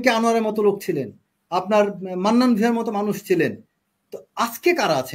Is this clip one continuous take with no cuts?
yes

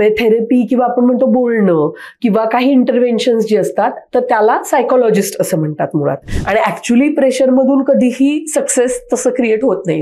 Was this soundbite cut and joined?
yes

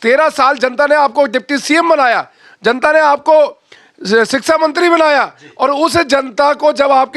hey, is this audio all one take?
yes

